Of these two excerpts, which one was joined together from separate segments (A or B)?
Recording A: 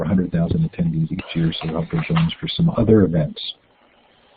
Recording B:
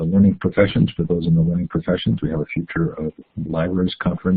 B